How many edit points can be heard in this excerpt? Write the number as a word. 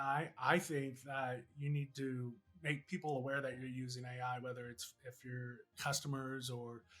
two